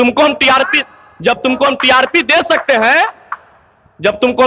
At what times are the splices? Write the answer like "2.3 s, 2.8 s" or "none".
none

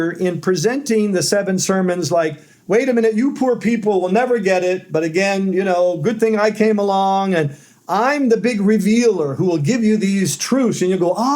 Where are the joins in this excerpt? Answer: none

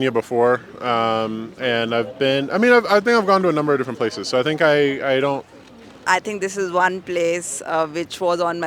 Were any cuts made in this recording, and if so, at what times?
5.9 s

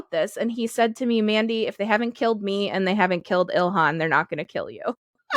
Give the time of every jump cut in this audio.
none

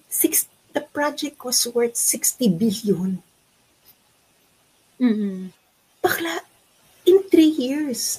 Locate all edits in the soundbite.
none

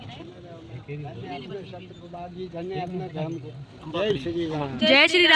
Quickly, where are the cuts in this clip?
none

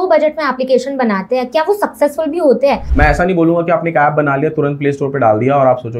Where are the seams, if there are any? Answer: 2.9 s

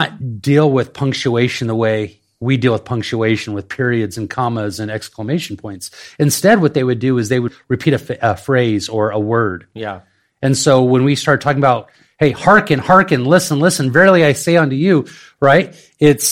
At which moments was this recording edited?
7.5 s

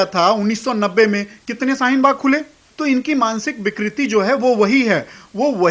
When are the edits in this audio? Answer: 2.7 s

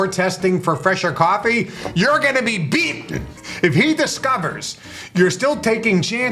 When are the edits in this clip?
3.4 s

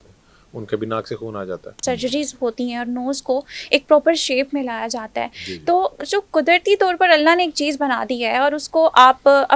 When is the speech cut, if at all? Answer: 1.8 s

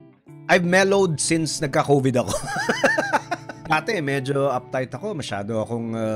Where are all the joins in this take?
3.6 s

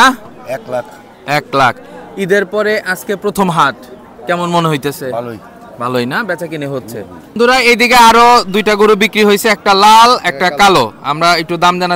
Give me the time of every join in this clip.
7.4 s

